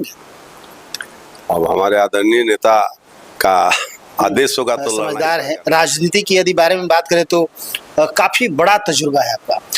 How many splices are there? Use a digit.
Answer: 1